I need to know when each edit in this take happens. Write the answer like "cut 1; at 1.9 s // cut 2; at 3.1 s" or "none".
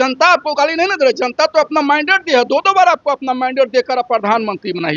none

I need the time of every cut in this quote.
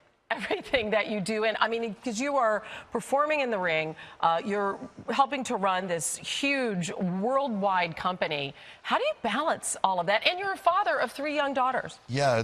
cut 1; at 10.0 s

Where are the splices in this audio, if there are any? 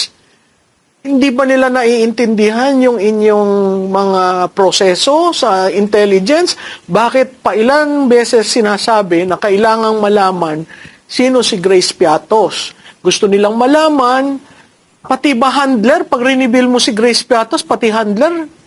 none

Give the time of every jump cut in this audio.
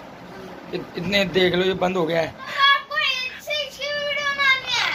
cut 1; at 2.5 s

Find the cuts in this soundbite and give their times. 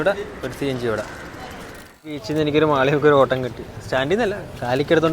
cut 1; at 2.2 s

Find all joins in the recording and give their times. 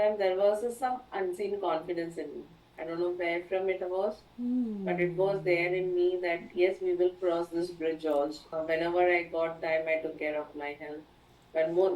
cut 1; at 8.4 s

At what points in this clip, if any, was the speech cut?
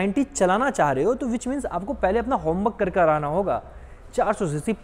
none

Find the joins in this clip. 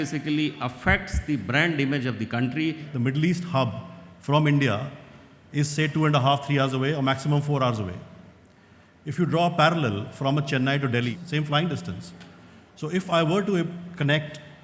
cut 1; at 2.9 s // cut 2; at 11.1 s

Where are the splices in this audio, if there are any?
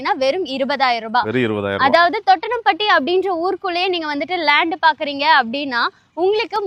none

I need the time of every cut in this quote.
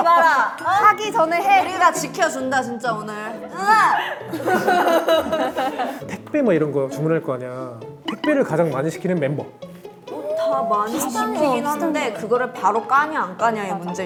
none

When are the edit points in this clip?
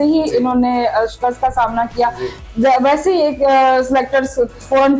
none

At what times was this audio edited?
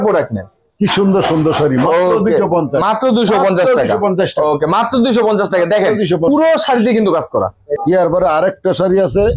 cut 1; at 7.7 s

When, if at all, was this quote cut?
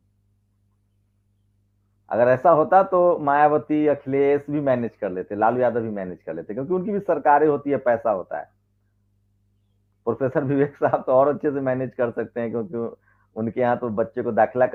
none

